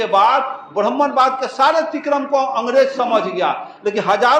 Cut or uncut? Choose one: uncut